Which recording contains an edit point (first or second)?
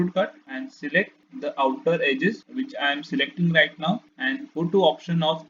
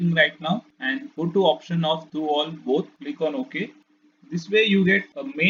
first